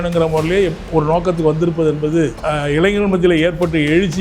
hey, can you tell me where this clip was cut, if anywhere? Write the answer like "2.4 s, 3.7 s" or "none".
2.4 s